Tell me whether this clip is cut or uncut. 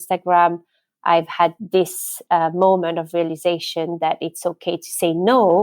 cut